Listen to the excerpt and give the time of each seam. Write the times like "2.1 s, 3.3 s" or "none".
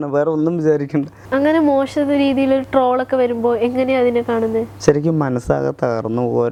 none